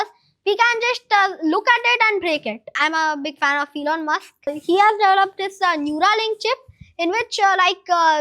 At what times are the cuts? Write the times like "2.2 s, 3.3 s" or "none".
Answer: 2.7 s, 4.5 s